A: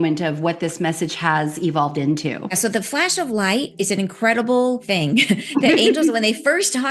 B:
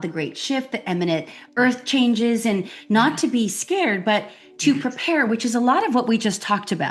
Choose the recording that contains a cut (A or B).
A